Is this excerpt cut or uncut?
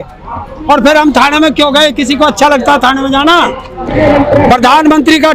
cut